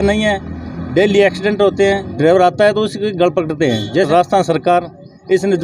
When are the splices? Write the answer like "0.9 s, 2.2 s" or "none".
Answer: 2.1 s, 4.1 s